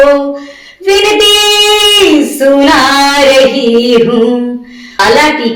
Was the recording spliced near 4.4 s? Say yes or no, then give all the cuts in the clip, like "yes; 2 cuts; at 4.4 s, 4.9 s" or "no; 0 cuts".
yes; 1 cut; at 4.4 s